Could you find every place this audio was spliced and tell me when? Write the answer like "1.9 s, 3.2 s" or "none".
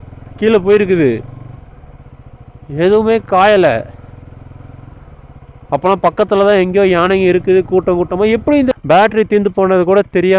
8.7 s